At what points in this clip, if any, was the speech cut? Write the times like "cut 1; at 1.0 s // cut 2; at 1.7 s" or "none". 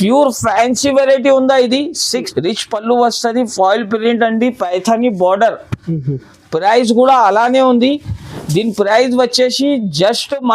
cut 1; at 2.3 s